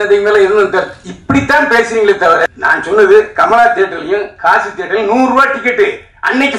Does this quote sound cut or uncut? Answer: cut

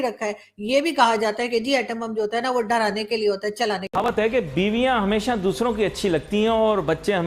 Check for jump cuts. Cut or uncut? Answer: cut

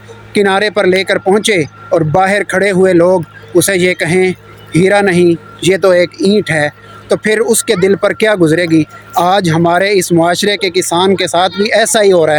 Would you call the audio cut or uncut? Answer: uncut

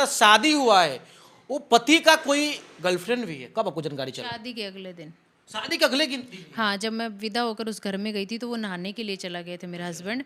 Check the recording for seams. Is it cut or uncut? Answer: uncut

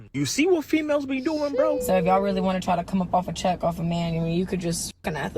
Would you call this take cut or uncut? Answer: cut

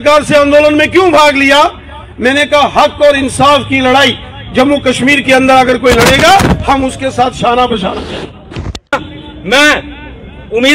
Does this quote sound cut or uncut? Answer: cut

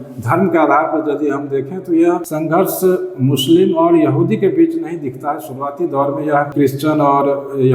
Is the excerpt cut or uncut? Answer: cut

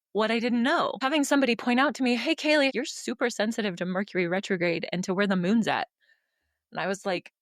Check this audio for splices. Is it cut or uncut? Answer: cut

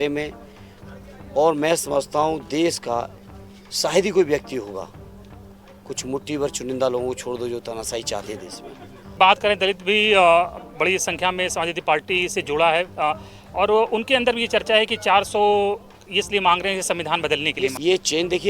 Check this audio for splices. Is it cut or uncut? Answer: cut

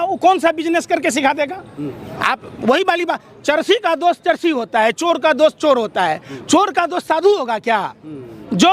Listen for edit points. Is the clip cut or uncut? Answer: uncut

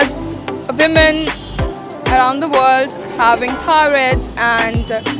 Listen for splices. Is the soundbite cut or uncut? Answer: uncut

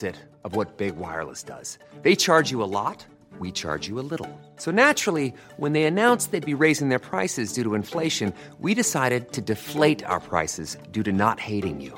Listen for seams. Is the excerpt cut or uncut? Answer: uncut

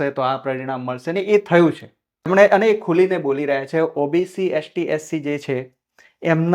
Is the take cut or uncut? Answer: cut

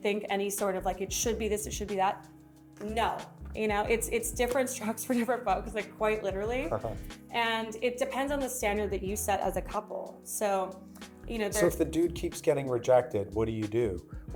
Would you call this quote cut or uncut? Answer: uncut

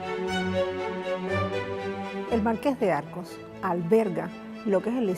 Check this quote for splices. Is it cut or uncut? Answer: uncut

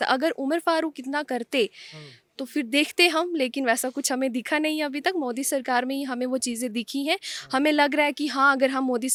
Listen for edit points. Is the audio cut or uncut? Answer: uncut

